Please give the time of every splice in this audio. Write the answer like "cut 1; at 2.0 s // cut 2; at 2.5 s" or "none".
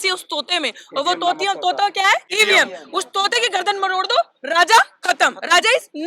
cut 1; at 2.3 s